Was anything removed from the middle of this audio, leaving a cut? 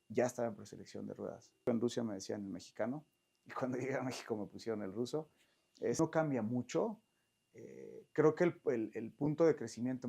yes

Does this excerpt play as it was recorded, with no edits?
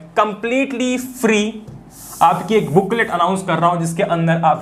yes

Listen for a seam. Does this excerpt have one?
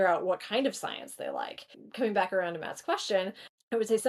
no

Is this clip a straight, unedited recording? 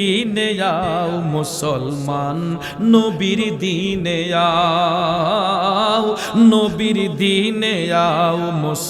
yes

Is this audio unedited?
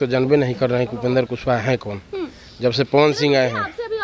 yes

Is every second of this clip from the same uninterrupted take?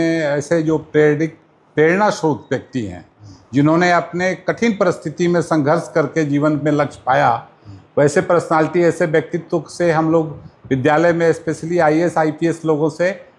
yes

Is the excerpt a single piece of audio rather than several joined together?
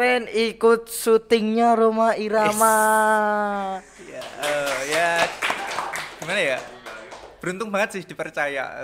yes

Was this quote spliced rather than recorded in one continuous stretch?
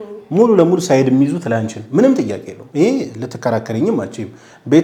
no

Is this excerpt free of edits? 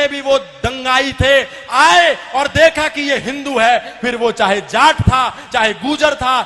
yes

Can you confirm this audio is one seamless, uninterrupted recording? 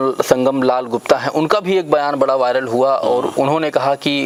yes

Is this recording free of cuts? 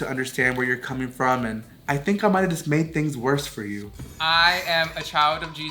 yes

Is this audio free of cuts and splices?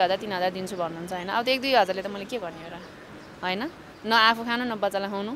yes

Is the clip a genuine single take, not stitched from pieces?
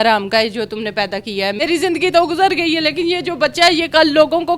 no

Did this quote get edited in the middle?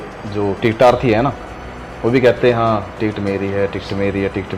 no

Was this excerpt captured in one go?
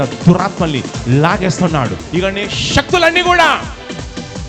no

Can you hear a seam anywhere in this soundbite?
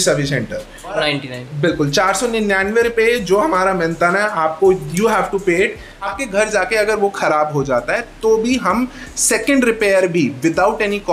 yes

